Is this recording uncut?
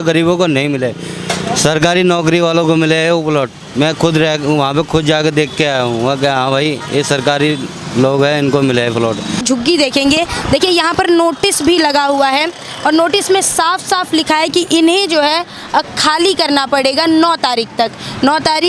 no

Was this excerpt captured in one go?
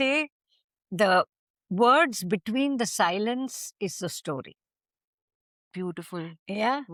yes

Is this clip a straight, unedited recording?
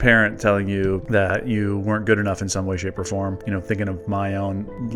yes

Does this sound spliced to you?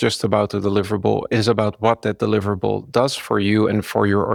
no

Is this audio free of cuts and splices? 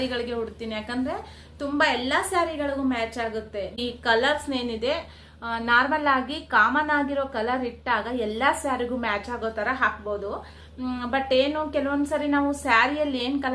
yes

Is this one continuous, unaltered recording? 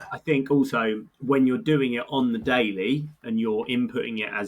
no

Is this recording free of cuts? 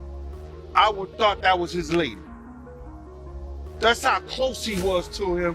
no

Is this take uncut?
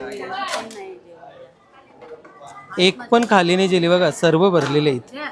yes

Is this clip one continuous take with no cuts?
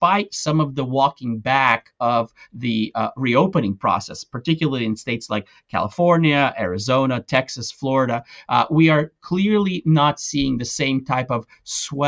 yes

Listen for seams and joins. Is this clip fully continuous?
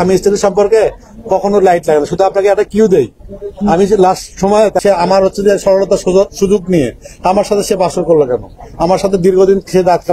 no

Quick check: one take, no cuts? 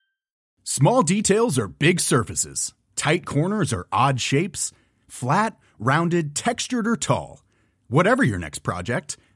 yes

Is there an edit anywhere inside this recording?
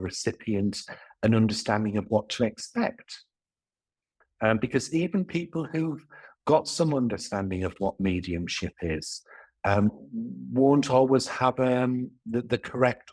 no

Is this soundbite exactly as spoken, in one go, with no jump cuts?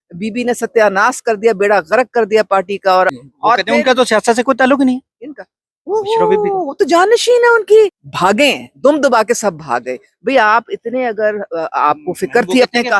no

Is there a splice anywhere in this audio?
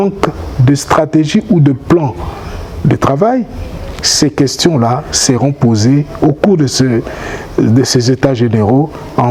no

